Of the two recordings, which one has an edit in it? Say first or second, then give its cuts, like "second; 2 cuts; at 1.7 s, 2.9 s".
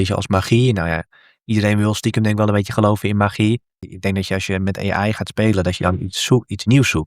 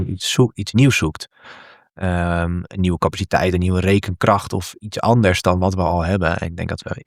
first; 1 cut; at 3.8 s